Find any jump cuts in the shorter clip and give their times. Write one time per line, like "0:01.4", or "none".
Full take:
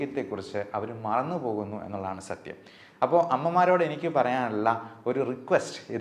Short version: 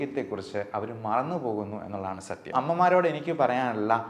0:02.5